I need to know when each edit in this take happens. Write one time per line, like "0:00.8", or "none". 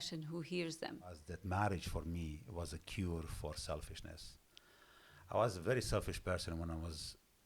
0:01.3